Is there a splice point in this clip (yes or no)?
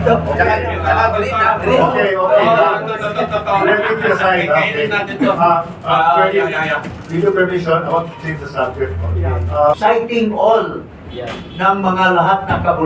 yes